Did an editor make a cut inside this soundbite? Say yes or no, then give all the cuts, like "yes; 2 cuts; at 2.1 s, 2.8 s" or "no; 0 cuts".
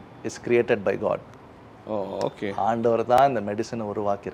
no; 0 cuts